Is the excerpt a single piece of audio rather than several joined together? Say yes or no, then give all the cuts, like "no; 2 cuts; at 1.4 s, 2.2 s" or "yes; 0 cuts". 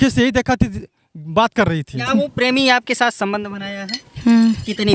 no; 1 cut; at 2.0 s